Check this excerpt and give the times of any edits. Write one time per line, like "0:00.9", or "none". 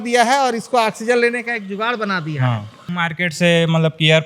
0:02.9